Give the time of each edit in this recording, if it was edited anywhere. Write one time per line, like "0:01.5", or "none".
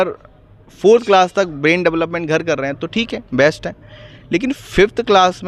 none